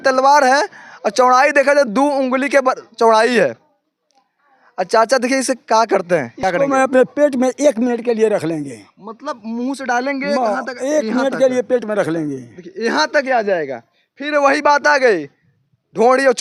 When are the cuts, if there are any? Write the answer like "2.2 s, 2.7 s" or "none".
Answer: none